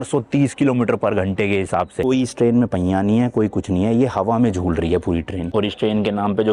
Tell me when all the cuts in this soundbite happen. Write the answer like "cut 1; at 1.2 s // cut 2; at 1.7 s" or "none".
cut 1; at 2.0 s // cut 2; at 5.5 s